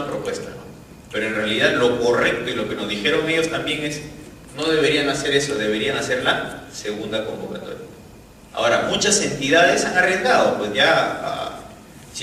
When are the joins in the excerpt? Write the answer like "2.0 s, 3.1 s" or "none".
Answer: none